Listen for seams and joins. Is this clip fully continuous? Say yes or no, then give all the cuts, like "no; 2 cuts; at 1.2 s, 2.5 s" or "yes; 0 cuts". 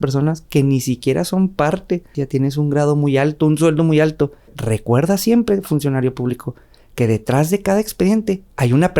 no; 2 cuts; at 2.2 s, 4.6 s